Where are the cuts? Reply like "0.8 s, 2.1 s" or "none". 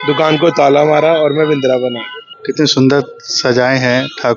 2.3 s